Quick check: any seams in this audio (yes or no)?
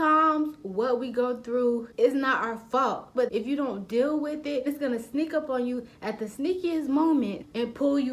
yes